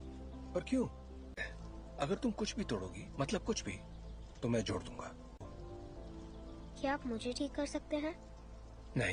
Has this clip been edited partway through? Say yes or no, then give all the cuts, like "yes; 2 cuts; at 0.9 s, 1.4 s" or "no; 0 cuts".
no; 0 cuts